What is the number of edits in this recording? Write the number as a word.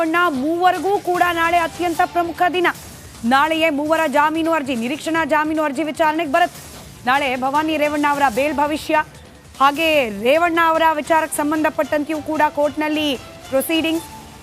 one